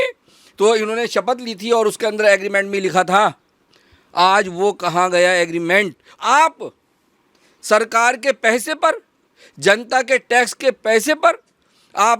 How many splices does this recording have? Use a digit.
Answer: 1